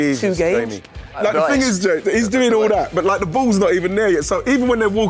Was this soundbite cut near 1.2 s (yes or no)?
yes